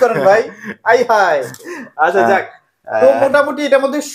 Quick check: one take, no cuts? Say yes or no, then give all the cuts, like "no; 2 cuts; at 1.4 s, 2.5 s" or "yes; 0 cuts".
yes; 0 cuts